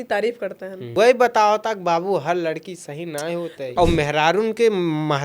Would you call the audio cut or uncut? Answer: cut